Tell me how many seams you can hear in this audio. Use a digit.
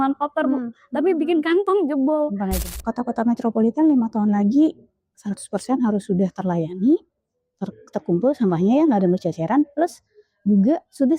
1